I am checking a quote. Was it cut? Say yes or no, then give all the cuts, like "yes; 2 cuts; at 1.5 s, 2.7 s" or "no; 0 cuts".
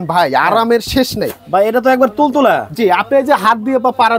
no; 0 cuts